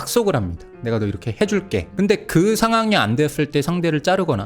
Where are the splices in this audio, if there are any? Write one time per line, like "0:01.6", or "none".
0:01.9